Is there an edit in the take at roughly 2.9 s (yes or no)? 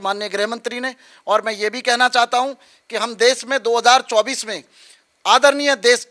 no